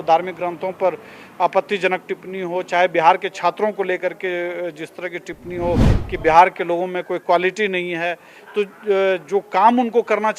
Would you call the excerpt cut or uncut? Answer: uncut